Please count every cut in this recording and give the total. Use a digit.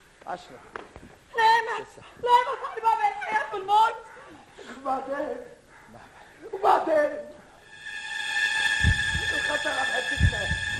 1